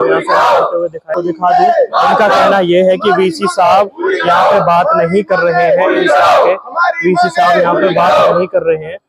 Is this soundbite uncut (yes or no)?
no